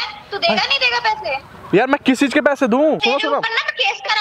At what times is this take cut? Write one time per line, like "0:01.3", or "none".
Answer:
0:03.0